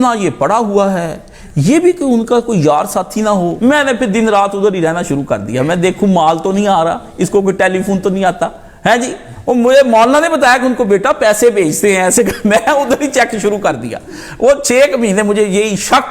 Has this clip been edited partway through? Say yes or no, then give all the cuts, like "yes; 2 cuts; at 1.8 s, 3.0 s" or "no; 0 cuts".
yes; 1 cut; at 3.5 s